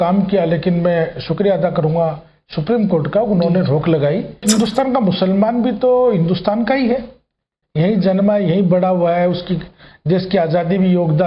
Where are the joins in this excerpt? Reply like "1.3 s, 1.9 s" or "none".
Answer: 4.4 s